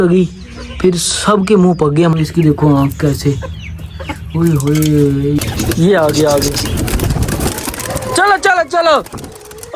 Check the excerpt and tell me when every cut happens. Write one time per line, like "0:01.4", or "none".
0:02.1
0:05.4